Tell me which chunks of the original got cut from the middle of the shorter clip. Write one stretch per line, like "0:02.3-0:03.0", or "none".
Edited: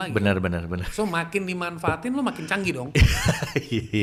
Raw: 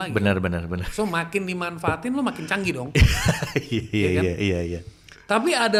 none